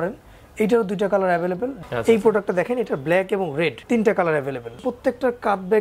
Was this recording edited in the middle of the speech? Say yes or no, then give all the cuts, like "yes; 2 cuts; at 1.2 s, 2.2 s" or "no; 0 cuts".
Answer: yes; 3 cuts; at 1.8 s, 3.8 s, 4.8 s